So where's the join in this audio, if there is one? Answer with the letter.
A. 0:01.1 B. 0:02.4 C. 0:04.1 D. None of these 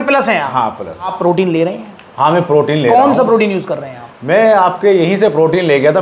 A